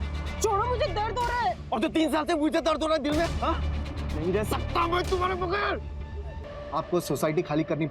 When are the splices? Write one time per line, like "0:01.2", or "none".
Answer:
0:06.5